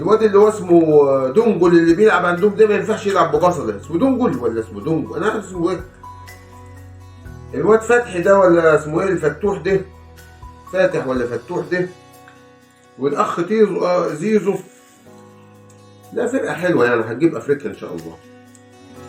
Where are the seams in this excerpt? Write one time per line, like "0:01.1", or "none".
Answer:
0:14.8
0:16.1